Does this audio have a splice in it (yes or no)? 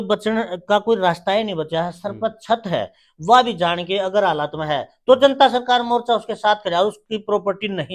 no